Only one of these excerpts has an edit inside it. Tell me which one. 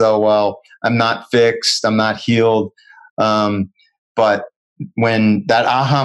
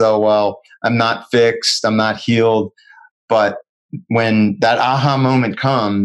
second; 1 cut; at 3.0 s

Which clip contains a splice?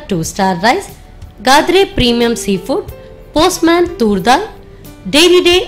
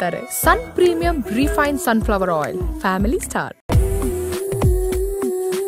second; 1 cut; at 3.4 s

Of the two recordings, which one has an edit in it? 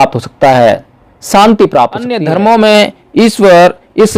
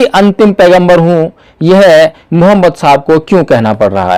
first; 1 cut; at 2.2 s

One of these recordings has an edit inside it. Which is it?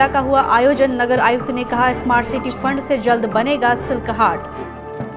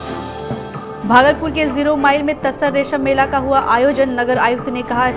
second; 1 cut; at 0.9 s

